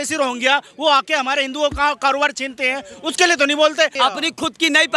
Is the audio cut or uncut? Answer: cut